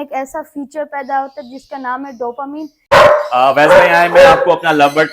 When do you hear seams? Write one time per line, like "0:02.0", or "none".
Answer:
0:02.9